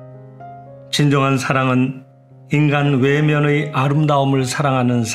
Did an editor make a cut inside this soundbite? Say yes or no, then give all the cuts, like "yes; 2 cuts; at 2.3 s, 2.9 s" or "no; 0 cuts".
yes; 1 cut; at 0.9 s